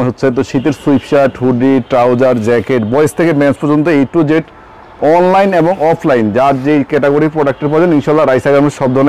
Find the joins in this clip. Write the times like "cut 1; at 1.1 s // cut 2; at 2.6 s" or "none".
none